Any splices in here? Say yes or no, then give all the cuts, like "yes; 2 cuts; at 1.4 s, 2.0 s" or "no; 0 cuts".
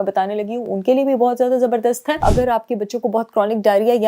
yes; 1 cut; at 2.2 s